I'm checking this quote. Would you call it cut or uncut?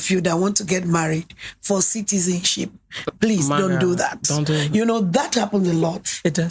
uncut